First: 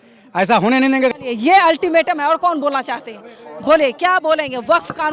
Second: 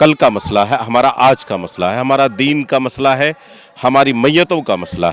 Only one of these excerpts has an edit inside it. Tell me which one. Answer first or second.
first